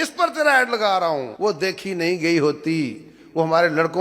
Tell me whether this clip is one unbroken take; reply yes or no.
no